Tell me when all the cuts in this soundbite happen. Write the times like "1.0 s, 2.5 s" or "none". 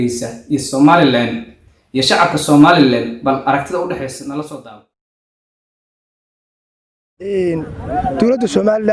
none